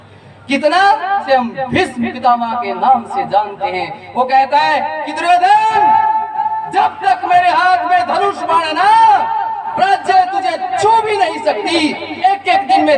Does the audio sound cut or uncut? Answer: cut